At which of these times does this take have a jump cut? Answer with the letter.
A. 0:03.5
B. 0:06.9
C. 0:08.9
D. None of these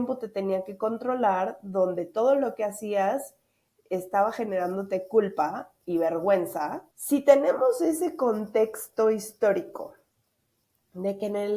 B